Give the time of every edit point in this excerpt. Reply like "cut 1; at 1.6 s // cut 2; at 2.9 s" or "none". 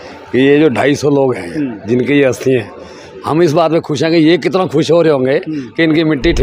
none